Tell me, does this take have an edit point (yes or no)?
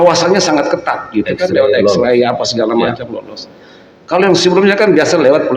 no